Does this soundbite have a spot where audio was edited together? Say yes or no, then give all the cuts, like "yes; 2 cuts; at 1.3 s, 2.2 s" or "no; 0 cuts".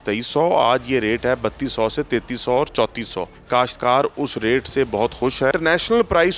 yes; 2 cuts; at 3.3 s, 5.5 s